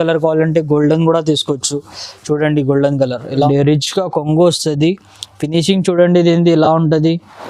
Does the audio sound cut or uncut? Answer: cut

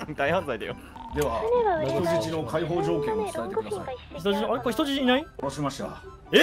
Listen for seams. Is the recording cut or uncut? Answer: cut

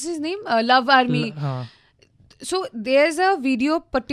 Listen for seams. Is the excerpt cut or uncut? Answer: uncut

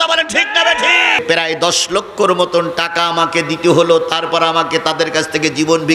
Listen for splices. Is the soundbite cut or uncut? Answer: cut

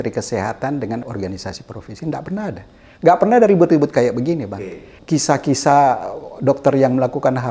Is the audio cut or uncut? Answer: cut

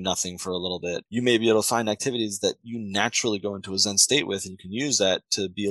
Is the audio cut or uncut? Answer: cut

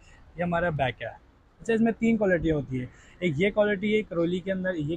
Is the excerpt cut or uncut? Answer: uncut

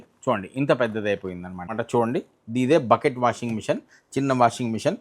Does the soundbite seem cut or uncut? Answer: cut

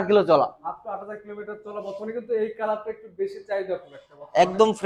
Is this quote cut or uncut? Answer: uncut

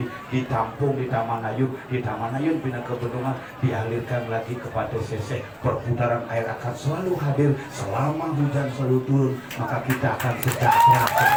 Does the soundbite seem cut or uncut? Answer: uncut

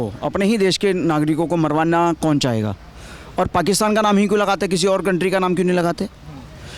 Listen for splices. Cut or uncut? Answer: uncut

